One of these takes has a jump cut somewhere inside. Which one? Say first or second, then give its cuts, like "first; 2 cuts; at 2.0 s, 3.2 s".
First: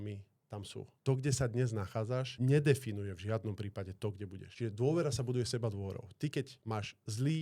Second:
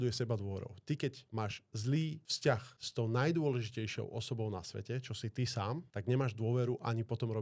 first; 3 cuts; at 0.9 s, 2.3 s, 4.4 s